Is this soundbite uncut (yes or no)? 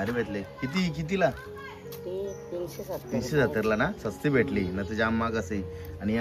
yes